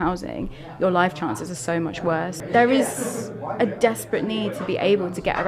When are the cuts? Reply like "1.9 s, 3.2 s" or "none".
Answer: 2.4 s